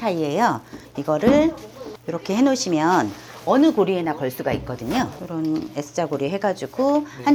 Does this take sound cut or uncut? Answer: uncut